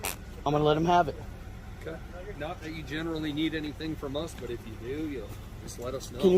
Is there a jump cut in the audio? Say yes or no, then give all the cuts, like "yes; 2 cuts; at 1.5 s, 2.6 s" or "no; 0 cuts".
yes; 1 cut; at 2.4 s